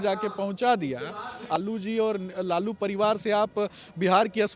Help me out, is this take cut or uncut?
cut